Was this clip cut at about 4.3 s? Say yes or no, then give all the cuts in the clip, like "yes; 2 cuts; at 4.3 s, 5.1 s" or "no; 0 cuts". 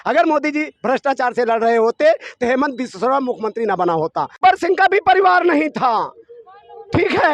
yes; 1 cut; at 4.3 s